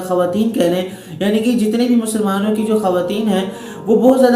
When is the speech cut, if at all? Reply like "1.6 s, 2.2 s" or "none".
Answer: none